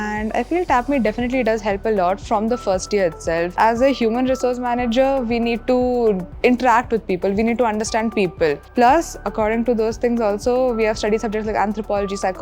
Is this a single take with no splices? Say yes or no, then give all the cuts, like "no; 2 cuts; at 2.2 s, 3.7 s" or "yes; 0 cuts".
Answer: no; 1 cut; at 3.5 s